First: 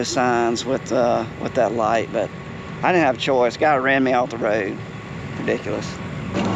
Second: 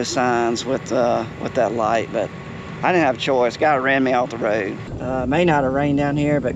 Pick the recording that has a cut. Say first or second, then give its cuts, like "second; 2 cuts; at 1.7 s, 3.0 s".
second; 1 cut; at 4.9 s